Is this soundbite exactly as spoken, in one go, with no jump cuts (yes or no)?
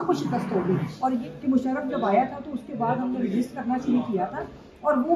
no